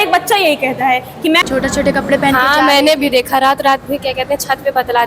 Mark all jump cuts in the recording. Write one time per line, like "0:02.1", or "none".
0:01.4